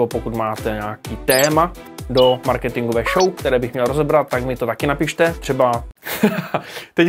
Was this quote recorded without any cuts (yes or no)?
yes